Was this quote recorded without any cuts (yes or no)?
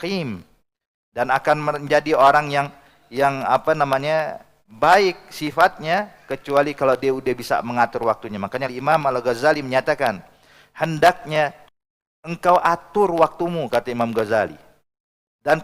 no